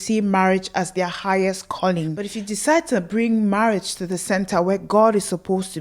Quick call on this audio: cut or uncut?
cut